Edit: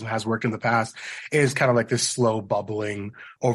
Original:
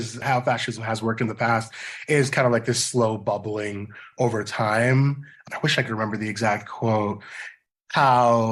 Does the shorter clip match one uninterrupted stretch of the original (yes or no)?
yes